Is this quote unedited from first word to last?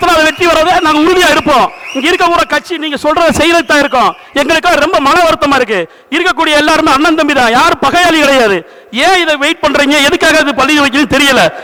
yes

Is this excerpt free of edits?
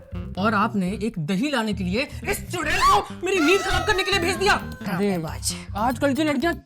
no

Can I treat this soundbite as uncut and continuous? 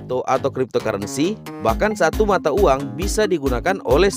yes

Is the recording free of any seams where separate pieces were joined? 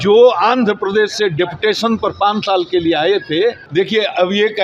no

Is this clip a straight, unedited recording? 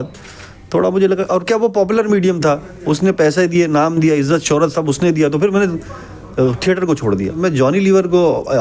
no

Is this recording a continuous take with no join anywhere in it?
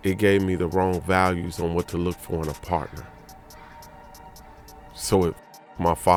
yes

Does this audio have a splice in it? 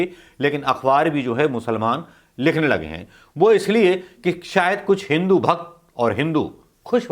no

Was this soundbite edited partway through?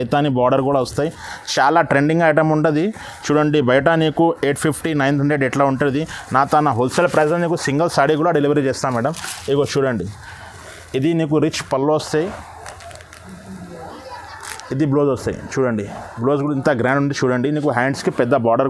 no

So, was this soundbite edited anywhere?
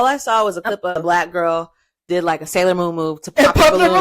yes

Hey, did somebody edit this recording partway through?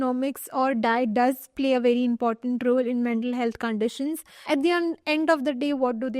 yes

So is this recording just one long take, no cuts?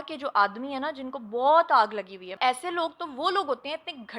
no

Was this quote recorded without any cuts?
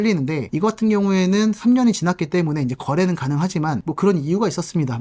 yes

